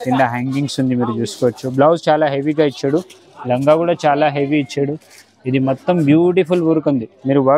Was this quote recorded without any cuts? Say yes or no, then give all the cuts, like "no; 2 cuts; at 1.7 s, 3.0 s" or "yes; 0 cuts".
yes; 0 cuts